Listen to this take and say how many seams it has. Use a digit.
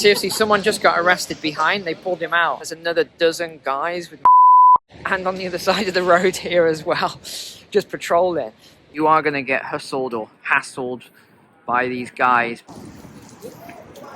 3